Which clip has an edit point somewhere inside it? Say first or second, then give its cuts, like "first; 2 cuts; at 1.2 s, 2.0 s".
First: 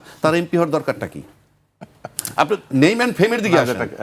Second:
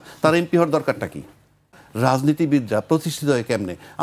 second; 1 cut; at 1.8 s